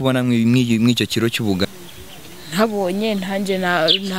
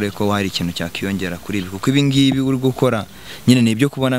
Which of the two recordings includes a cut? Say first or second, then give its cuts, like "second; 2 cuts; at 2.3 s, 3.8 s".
first; 1 cut; at 1.7 s